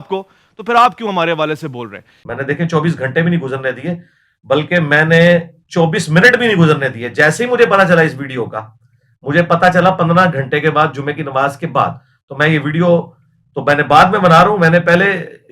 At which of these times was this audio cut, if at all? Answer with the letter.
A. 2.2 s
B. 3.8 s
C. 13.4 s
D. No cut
A